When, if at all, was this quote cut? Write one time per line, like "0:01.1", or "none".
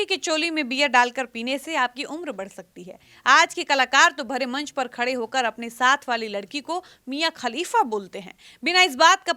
none